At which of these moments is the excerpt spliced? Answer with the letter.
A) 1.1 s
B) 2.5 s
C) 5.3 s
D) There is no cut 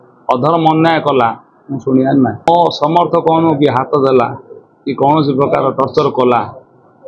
B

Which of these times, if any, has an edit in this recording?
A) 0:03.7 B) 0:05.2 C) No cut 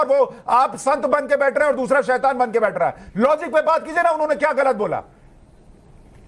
C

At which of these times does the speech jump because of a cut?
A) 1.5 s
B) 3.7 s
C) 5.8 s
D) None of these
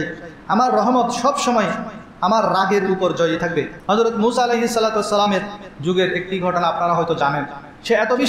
B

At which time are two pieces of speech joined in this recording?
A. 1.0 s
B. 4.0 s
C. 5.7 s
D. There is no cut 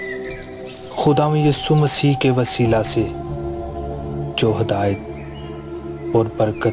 A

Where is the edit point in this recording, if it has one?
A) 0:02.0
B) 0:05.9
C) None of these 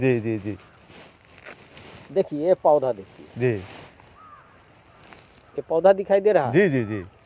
C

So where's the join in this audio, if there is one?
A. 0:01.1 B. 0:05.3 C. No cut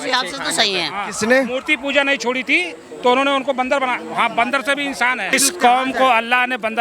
B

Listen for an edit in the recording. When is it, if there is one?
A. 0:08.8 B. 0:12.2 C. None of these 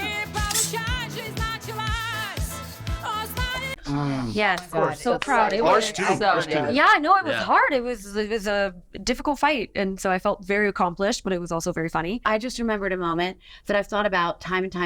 B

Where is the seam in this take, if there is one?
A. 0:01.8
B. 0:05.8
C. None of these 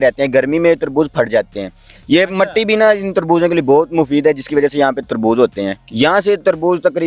B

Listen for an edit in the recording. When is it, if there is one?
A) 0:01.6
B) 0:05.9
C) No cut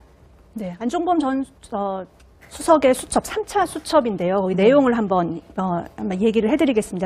B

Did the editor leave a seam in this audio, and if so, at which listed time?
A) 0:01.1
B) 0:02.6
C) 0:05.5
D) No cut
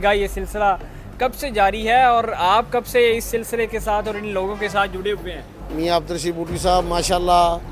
C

